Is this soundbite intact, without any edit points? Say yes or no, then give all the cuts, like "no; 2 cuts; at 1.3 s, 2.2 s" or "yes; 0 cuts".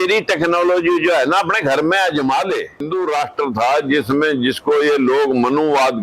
no; 1 cut; at 2.8 s